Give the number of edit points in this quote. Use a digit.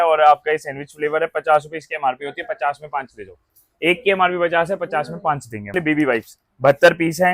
1